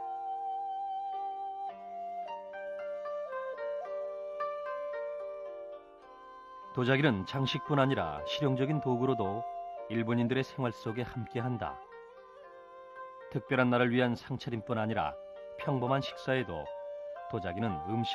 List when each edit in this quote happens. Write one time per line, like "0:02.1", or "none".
0:01.3